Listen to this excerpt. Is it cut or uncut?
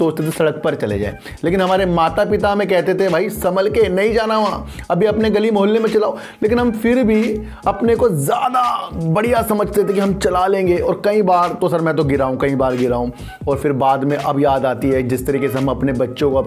uncut